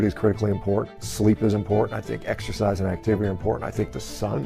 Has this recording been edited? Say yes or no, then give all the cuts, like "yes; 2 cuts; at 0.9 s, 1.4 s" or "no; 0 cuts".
yes; 1 cut; at 1.0 s